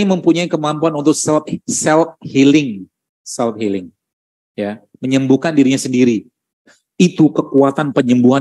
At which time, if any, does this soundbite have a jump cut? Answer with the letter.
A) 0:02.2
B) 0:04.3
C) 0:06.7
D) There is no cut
C